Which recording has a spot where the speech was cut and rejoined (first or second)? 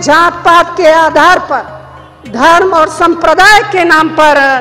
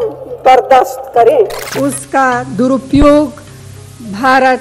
second